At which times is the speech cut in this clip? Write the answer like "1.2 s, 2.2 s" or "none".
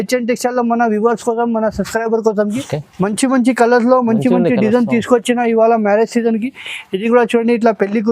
2.5 s